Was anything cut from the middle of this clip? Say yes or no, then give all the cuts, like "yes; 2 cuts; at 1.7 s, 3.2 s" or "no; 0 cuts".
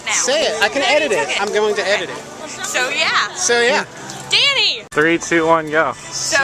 yes; 1 cut; at 4.8 s